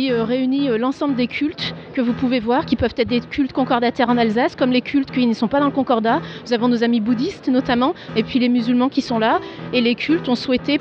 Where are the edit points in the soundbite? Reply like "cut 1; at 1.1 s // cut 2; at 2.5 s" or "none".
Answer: cut 1; at 3.3 s